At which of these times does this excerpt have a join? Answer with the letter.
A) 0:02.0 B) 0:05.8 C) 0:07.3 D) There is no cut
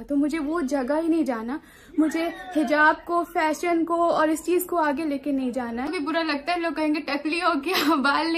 B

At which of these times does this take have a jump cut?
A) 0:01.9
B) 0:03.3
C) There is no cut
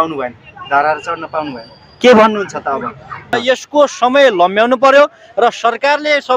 B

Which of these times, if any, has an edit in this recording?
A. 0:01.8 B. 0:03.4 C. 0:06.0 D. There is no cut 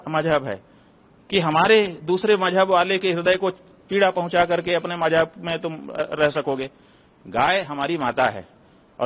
D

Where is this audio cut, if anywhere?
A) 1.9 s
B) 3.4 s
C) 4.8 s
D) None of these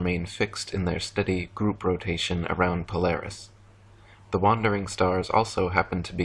C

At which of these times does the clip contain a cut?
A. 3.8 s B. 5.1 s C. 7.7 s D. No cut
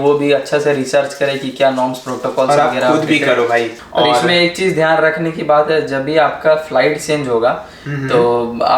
A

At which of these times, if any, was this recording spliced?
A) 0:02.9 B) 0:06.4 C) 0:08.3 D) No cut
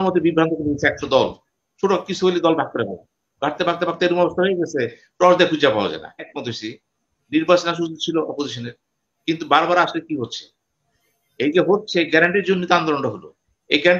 B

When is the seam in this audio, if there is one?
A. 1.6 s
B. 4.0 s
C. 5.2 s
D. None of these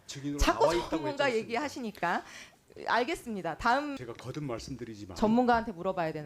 B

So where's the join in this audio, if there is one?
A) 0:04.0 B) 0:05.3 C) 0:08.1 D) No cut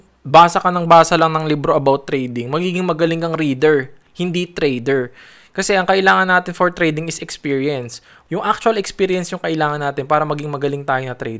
C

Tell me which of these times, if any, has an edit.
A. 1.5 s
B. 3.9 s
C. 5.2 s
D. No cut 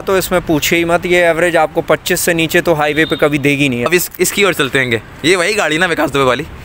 B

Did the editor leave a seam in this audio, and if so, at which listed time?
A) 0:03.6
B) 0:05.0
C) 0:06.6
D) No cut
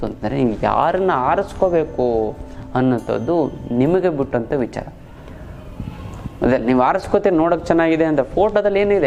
D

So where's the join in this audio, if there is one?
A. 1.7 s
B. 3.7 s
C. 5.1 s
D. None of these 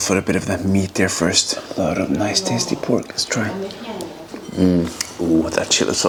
D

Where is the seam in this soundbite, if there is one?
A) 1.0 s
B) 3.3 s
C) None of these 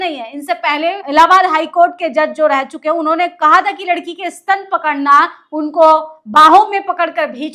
A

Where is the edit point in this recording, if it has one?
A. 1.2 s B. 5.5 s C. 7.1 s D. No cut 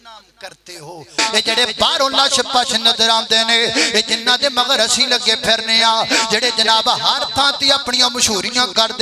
A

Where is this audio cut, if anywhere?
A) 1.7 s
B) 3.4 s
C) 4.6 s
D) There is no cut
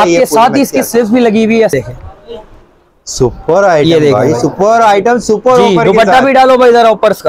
A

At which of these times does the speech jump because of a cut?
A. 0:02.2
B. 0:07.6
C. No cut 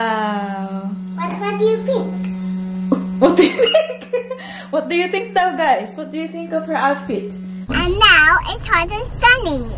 B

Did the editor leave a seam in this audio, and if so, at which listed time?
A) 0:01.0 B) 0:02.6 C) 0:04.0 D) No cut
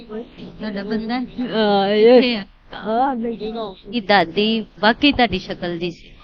C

